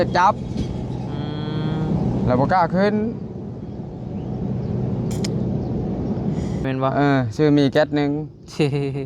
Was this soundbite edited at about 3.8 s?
no; 1 cut; at 6.6 s

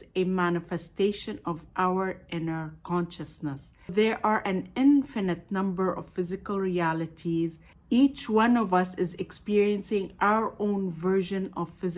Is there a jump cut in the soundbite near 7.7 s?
yes; 2 cuts; at 3.9 s, 7.7 s

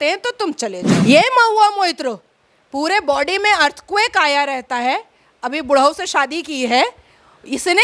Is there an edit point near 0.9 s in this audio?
yes; 1 cut; at 0.9 s

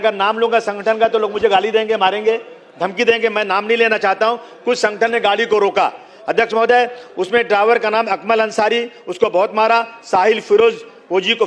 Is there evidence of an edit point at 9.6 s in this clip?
no; 0 cuts

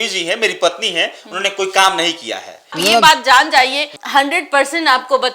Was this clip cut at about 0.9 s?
no; 1 cut; at 2.8 s

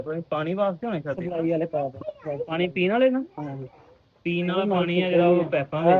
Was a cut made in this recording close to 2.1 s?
no; 0 cuts

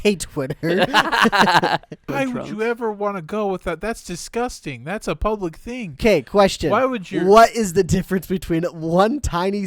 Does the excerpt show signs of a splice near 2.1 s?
yes; 1 cut; at 2.1 s

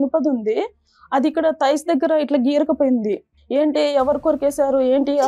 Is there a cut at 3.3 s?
yes; 1 cut; at 3.3 s

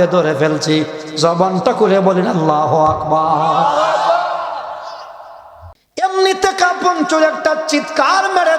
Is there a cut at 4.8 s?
no; 1 cut; at 6.0 s

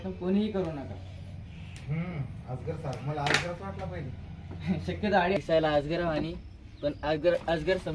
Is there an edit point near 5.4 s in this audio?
yes; 1 cut; at 5.4 s

